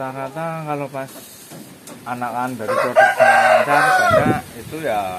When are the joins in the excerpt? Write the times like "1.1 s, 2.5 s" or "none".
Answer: none